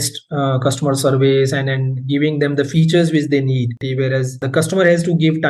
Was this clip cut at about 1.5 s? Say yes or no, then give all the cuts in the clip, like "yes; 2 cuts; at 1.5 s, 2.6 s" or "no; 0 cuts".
no; 1 cut; at 3.8 s